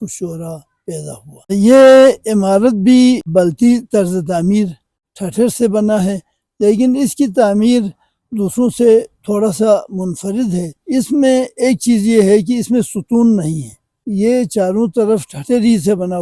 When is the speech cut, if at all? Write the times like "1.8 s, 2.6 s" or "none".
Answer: 1.5 s